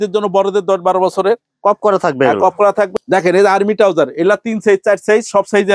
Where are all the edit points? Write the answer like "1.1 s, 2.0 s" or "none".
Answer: 2.9 s